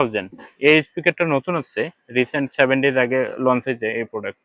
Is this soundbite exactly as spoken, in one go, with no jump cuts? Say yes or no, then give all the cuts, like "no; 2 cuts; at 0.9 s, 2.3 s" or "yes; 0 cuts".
yes; 0 cuts